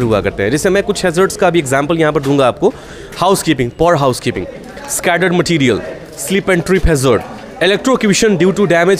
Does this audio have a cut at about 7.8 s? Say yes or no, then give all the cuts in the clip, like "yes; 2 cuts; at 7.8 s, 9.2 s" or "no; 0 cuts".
no; 0 cuts